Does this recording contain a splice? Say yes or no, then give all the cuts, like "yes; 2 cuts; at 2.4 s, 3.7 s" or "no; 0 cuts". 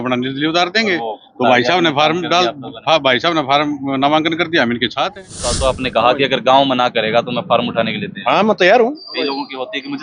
yes; 1 cut; at 5.6 s